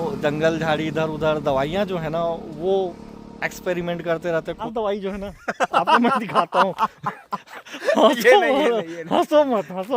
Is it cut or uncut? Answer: cut